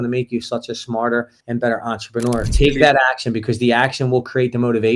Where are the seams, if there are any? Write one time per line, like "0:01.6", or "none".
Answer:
0:02.5